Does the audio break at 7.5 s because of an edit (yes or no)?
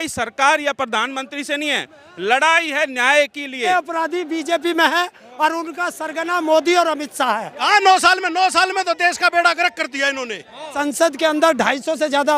yes